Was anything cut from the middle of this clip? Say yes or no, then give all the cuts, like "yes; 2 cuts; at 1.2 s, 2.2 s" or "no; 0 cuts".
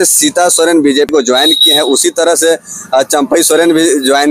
yes; 1 cut; at 1.1 s